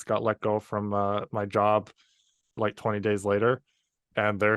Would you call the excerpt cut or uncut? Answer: cut